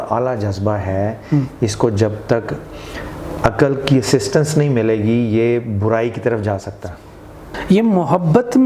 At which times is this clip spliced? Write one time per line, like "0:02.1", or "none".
0:07.6